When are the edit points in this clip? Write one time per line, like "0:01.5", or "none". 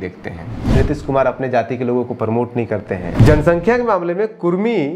0:00.8
0:03.1